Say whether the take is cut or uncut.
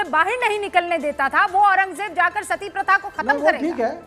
uncut